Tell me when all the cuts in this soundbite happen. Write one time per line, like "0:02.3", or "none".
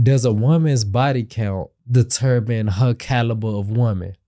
0:01.8